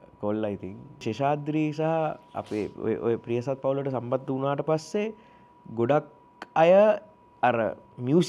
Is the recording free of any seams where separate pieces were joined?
no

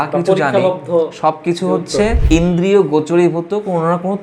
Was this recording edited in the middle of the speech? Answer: yes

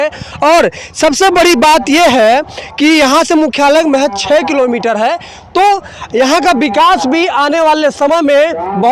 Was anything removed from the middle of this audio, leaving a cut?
no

